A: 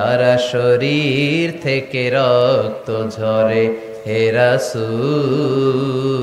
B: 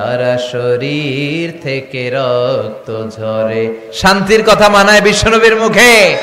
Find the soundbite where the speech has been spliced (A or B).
B